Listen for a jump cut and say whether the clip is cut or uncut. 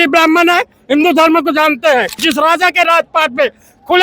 cut